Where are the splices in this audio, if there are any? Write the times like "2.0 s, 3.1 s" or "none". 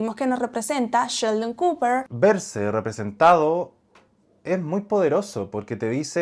2.1 s

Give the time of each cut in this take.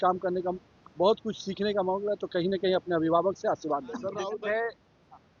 4.3 s

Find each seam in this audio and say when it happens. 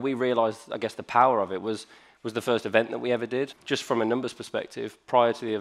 3.6 s

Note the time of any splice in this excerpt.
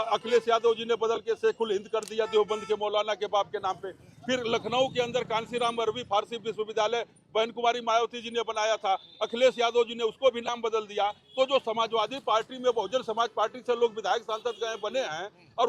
none

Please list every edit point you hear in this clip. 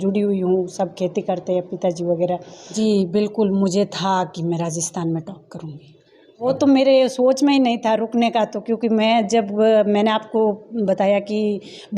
2.7 s, 6.4 s

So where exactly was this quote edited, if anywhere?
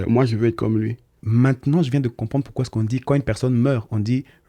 1.1 s

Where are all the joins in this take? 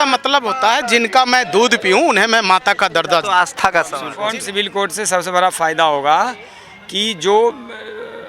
4.1 s

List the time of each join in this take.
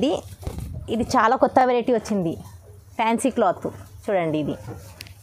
none

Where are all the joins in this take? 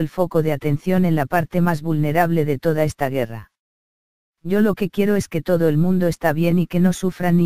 1.7 s

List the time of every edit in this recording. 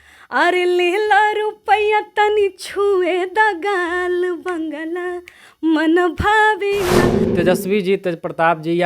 7.2 s

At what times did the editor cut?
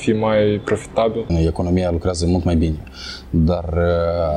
1.3 s

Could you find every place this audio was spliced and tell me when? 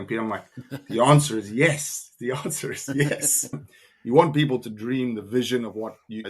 3.6 s

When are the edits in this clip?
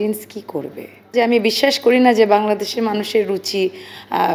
1.1 s

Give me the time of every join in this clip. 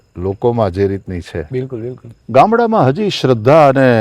2.1 s

